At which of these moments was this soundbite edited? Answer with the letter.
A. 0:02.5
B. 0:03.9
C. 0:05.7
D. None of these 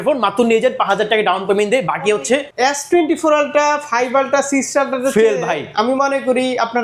A